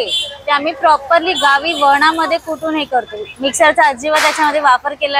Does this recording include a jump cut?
no; 0 cuts

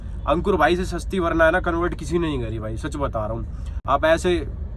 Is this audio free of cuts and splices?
yes; 0 cuts

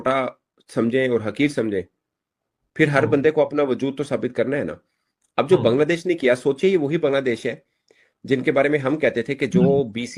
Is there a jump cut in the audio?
no; 0 cuts

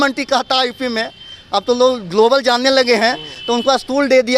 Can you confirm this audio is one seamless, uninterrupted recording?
yes; 0 cuts

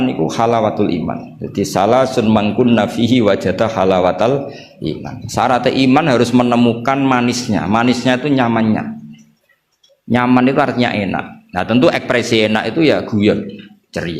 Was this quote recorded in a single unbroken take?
yes; 0 cuts

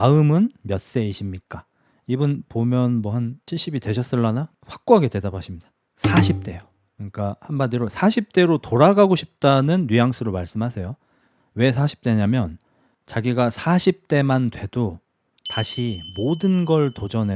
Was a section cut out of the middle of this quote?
no; 0 cuts

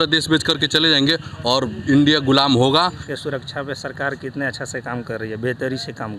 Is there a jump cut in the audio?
yes; 1 cut; at 3.0 s

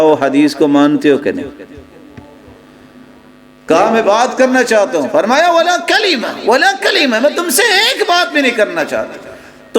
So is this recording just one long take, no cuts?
yes; 0 cuts

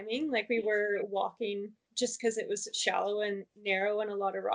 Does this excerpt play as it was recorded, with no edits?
no; 1 cut; at 1.8 s

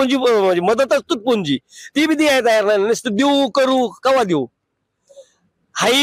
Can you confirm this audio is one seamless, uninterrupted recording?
yes; 0 cuts

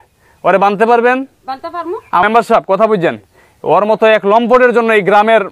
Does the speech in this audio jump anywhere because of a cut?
yes; 1 cut; at 2.2 s

